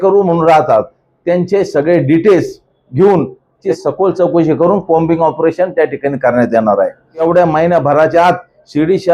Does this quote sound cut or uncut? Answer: cut